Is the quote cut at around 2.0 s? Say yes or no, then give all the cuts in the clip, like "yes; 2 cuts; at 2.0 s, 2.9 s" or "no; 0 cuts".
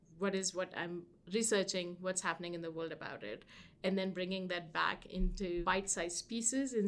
no; 1 cut; at 5.6 s